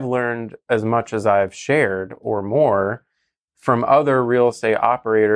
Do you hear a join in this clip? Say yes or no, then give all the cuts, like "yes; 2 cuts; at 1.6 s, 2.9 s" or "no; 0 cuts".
no; 0 cuts